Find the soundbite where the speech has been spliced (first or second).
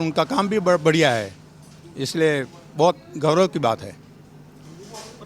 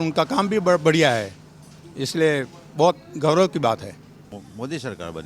second